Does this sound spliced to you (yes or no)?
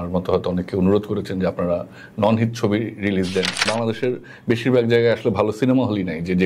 yes